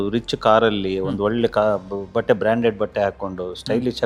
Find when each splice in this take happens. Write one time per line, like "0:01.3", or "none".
none